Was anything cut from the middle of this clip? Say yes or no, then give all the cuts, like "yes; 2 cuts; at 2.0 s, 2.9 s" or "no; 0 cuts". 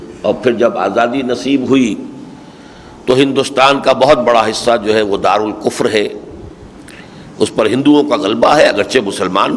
no; 0 cuts